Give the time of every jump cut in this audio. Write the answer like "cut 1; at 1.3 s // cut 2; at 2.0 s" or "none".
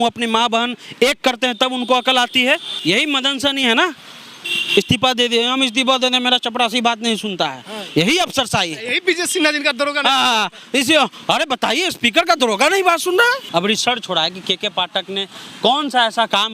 cut 1; at 2.7 s // cut 2; at 13.4 s